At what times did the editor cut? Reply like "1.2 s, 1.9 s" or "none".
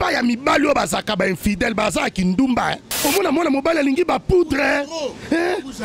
3.0 s